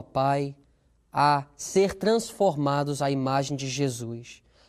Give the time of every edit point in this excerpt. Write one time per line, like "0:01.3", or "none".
0:01.6